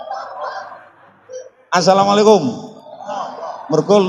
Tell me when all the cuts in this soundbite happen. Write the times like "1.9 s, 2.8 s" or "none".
none